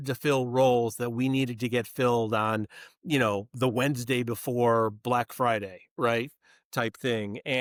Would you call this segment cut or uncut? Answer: uncut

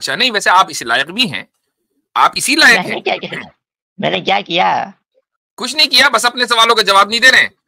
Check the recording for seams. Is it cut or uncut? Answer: uncut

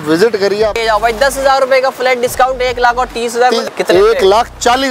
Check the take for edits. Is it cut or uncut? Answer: cut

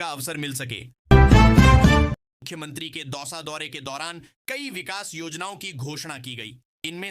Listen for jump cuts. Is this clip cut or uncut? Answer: cut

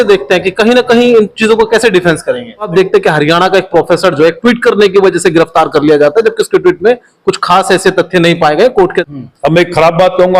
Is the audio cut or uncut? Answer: cut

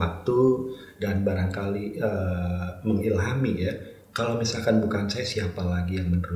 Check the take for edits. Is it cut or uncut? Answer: uncut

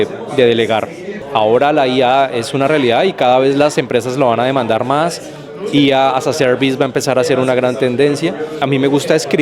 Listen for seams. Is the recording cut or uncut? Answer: cut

